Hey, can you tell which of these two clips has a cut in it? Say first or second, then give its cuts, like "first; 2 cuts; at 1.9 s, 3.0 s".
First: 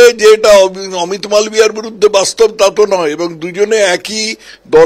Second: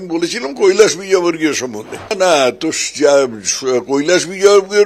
second; 1 cut; at 2.1 s